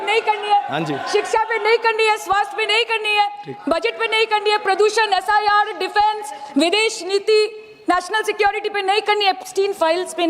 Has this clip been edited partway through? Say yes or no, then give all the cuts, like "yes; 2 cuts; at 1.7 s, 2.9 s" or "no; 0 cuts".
no; 0 cuts